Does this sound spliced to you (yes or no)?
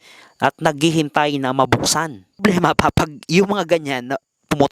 yes